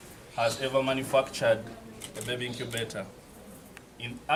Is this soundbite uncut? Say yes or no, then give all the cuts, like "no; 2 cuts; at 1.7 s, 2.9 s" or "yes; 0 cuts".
yes; 0 cuts